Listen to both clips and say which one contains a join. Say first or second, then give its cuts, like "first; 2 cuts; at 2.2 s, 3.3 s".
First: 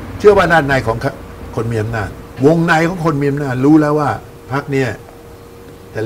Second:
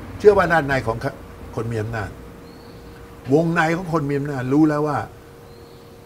first; 2 cuts; at 2.2 s, 4.3 s